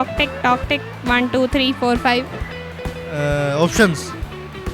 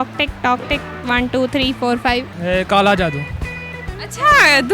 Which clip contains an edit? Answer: second; 1 cut; at 2.3 s

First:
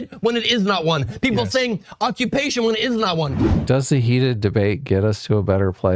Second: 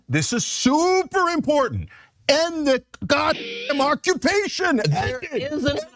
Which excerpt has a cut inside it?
first; 1 cut; at 3.4 s

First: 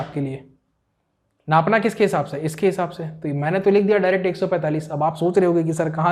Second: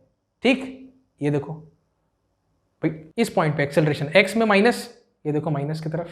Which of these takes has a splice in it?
second; 1 cut; at 3.0 s

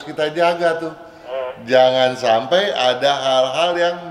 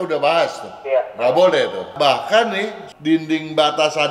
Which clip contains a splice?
second; 2 cuts; at 1.9 s, 2.8 s

